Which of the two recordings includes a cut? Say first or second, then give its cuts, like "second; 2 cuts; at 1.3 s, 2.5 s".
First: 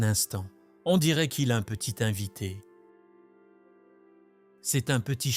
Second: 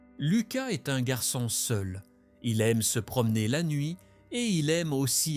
first; 2 cuts; at 2.6 s, 4.1 s